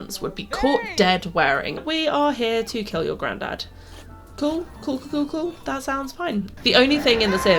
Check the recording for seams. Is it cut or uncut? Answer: cut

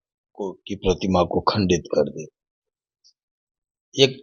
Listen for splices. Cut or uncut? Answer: uncut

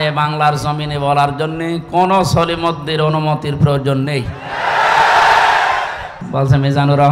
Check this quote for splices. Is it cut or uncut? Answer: cut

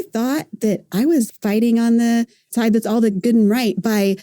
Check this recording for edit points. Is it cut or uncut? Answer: cut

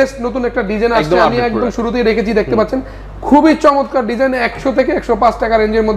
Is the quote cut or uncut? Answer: uncut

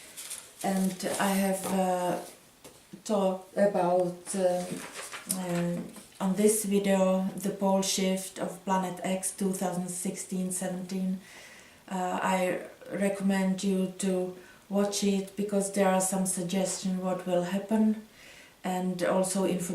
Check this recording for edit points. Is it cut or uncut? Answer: cut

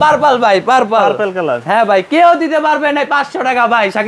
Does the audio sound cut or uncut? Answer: uncut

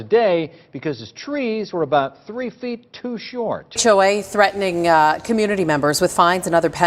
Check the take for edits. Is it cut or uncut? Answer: cut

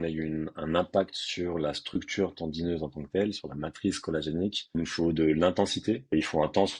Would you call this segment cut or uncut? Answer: cut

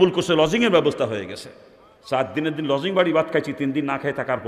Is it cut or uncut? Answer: uncut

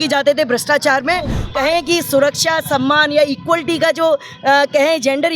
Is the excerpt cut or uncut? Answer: cut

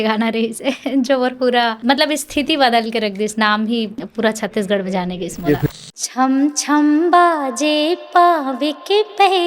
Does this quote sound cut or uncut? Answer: cut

